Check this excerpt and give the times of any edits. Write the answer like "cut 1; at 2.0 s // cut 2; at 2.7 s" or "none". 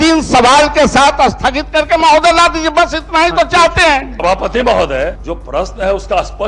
cut 1; at 4.1 s // cut 2; at 5.3 s